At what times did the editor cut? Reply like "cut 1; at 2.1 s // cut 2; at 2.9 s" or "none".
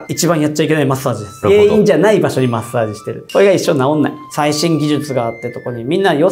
cut 1; at 1.4 s // cut 2; at 4.2 s